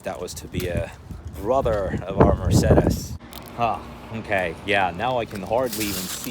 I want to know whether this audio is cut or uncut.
cut